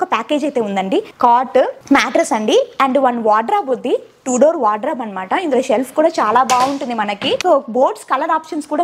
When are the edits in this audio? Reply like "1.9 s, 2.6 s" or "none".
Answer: 1.1 s, 1.8 s, 7.4 s